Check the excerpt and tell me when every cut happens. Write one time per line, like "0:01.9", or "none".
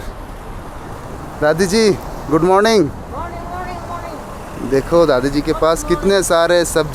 none